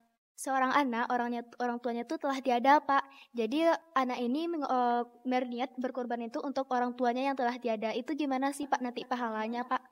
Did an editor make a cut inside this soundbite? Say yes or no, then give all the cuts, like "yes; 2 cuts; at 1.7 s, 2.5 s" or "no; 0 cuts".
no; 0 cuts